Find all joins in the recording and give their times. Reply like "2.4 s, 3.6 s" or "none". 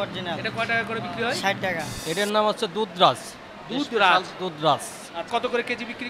1.9 s, 5.3 s

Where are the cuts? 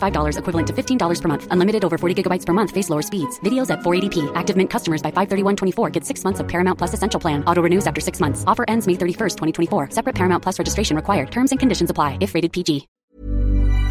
13.0 s

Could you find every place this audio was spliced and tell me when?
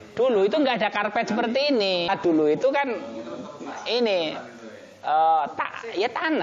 2.1 s

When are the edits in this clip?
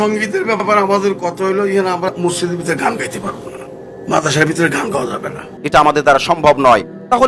none

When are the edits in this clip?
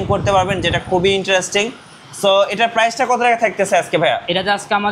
none

